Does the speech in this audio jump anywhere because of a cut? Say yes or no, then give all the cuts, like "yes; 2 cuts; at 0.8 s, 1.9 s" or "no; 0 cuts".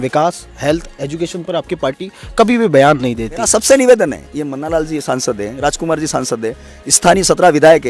yes; 1 cut; at 3.5 s